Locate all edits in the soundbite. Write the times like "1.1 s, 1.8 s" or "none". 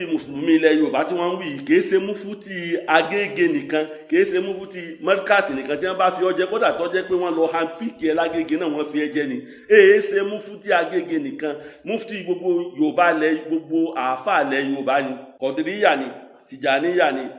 15.2 s